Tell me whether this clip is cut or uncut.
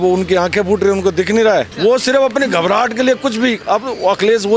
cut